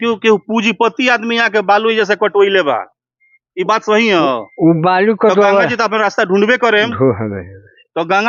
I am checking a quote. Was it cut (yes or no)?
no